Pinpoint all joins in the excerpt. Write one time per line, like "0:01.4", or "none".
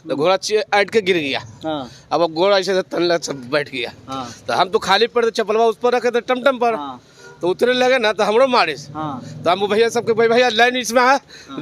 none